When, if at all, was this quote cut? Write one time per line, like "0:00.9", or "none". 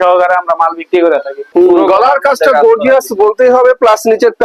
0:01.4

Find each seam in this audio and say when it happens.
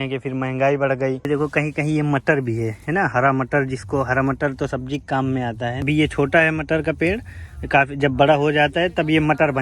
0:01.3
0:05.8

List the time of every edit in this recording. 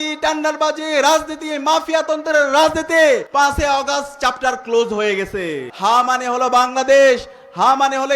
0:03.3
0:05.7

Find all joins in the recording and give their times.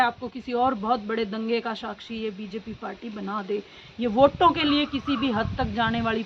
none

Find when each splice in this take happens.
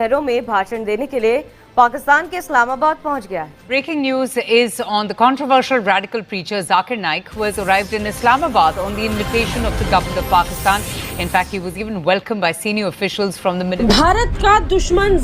0:03.6
0:13.8

